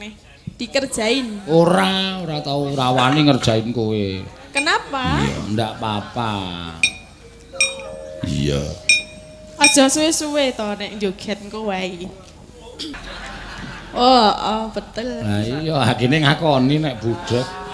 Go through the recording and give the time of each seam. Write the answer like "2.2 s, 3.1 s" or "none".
13.0 s

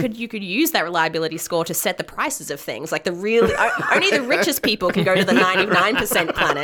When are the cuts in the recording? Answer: none

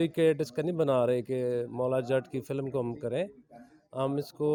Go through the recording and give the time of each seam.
none

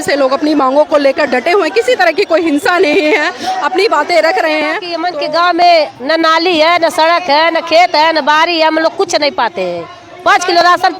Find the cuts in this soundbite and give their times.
4.9 s

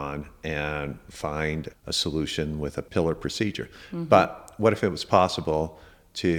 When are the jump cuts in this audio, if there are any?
1.7 s, 2.9 s

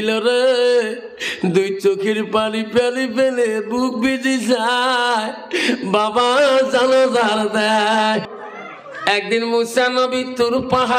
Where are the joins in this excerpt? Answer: 8.3 s

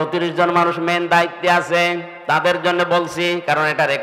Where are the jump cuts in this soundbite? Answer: none

